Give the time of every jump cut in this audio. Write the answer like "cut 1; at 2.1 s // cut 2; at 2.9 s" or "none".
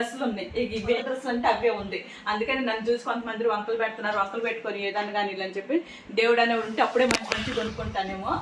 cut 1; at 1.0 s